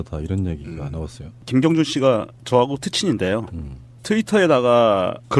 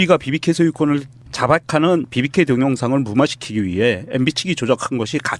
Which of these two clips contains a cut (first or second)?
second